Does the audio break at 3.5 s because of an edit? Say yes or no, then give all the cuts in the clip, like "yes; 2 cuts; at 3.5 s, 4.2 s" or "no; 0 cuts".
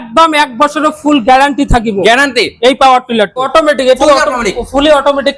yes; 1 cut; at 3.5 s